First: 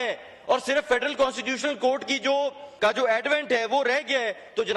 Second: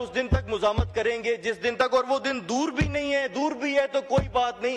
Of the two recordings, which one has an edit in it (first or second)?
first